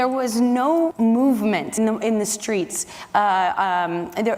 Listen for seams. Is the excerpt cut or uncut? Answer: cut